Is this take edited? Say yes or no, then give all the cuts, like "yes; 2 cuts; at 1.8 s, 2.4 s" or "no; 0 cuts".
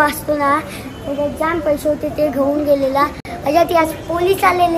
no; 0 cuts